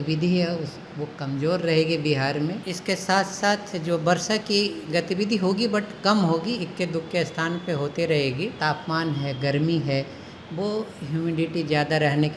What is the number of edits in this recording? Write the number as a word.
two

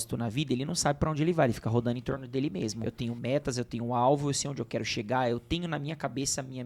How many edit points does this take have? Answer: one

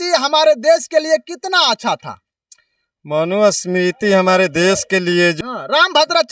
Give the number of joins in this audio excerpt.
one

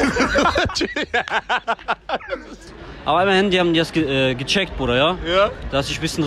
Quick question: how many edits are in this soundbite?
one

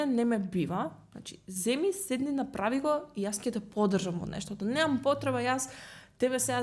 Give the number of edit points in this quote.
zero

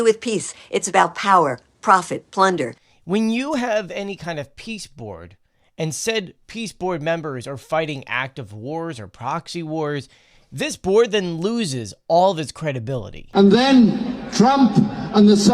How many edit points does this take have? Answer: two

